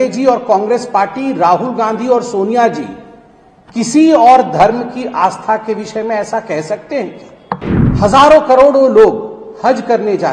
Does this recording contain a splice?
yes; 1 cut; at 7.8 s

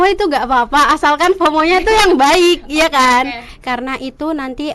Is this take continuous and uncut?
no; 1 cut; at 3.5 s

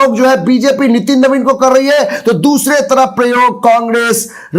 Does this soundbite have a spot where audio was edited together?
no; 0 cuts

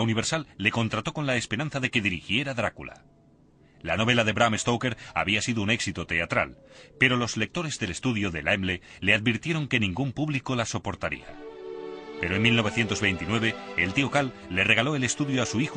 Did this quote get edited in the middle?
yes; 1 cut; at 13.5 s

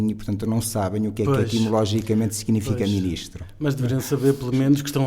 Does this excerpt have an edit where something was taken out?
no; 0 cuts

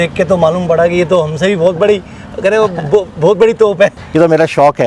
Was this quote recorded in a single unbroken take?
no; 1 cut; at 4.0 s

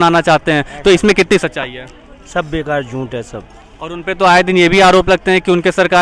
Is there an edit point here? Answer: no; 0 cuts

